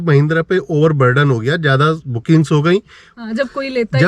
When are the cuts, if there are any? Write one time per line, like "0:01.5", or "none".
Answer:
0:03.0

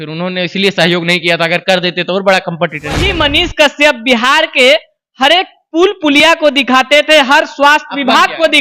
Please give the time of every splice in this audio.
0:03.1

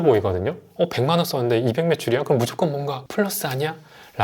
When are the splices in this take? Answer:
0:03.0

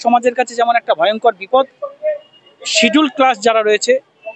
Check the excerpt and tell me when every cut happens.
none

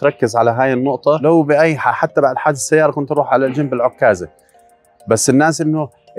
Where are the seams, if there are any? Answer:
0:01.2

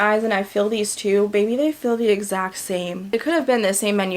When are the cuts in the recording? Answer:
0:03.1

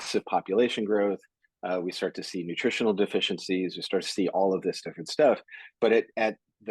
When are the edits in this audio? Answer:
none

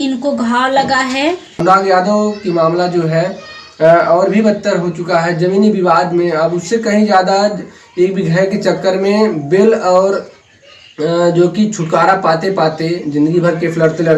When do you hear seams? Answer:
0:01.6

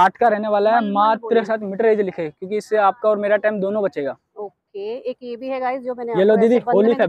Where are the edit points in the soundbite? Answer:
0:01.5

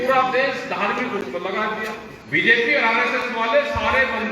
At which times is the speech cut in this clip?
0:02.1

